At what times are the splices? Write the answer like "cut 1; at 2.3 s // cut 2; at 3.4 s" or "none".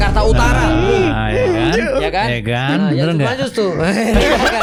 none